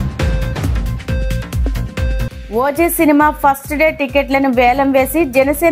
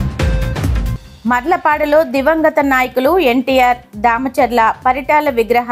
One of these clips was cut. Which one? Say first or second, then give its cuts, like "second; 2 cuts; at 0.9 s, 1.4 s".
second; 1 cut; at 0.9 s